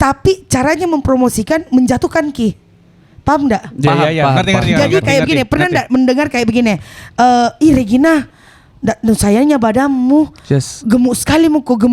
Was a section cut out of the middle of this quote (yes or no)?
no